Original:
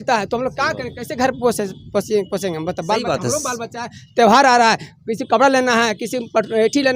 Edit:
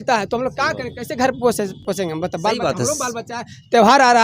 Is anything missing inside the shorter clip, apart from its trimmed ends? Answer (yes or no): yes